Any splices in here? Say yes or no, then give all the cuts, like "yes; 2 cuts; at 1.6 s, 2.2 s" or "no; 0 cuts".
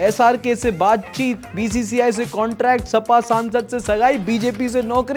no; 0 cuts